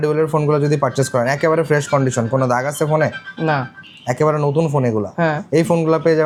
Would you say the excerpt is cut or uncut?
uncut